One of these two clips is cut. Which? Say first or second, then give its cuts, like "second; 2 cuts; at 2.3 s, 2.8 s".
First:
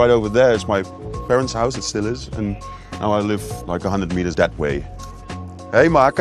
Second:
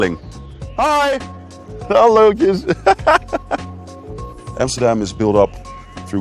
second; 1 cut; at 4.0 s